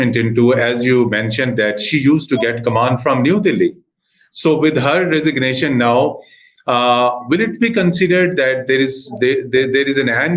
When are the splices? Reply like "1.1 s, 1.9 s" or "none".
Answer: none